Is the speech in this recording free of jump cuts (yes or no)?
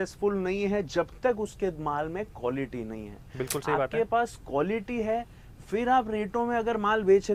yes